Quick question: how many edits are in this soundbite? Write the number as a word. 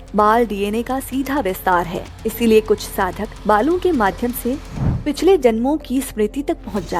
two